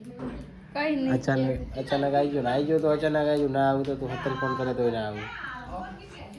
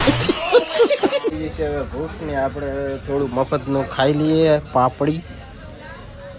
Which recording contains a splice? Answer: second; 1 cut; at 1.3 s

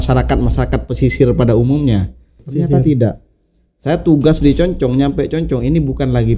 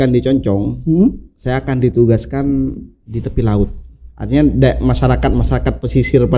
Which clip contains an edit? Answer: first; 1 cut; at 2.5 s

